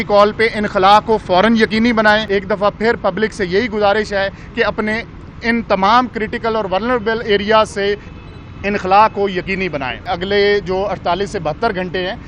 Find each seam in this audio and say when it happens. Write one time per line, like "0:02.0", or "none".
0:02.2
0:10.0